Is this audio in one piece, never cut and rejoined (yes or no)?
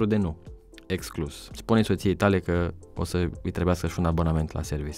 no